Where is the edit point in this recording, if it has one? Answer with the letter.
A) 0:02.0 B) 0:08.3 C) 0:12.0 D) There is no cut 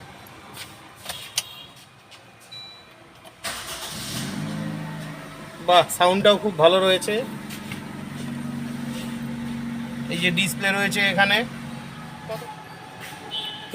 C